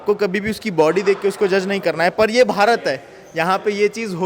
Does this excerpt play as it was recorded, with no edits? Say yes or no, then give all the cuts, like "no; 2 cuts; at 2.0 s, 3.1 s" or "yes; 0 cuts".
yes; 0 cuts